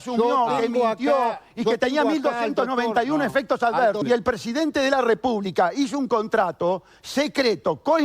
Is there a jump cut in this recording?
yes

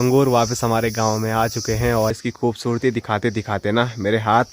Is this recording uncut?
no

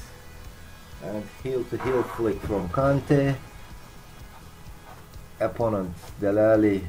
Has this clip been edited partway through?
no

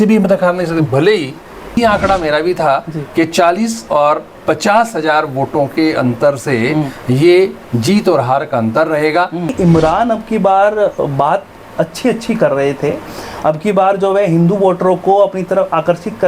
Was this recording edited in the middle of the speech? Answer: yes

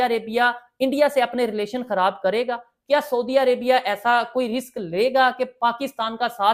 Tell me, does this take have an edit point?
no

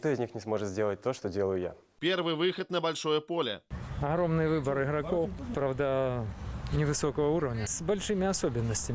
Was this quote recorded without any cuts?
no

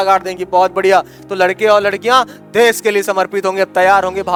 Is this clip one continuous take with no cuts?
yes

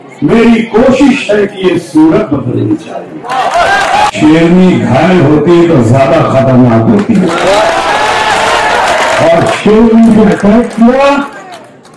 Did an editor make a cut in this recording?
yes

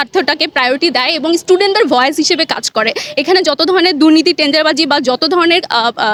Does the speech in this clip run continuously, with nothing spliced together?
yes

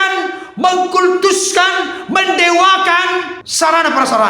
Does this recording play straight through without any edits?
no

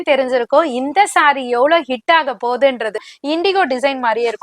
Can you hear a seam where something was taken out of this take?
yes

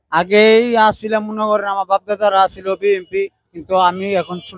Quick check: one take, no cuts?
yes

